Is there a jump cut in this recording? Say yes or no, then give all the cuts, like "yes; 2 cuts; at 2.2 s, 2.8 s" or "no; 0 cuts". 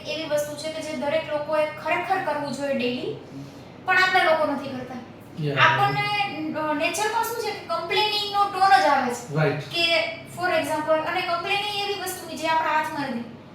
no; 0 cuts